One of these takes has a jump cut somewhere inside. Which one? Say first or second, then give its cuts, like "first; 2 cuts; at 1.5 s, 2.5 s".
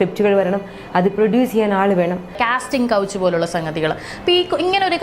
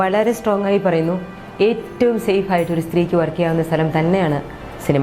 first; 1 cut; at 2.4 s